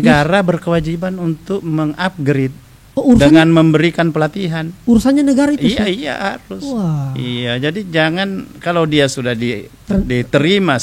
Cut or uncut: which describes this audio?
uncut